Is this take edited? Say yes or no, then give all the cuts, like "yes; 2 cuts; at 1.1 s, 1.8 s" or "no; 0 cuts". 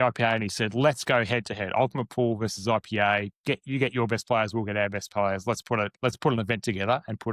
no; 0 cuts